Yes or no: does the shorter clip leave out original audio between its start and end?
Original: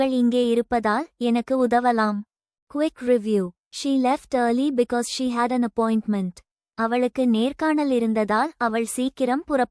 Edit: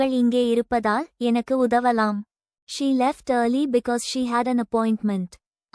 yes